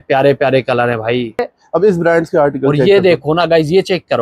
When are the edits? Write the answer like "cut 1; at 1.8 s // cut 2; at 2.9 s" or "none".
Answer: cut 1; at 1.5 s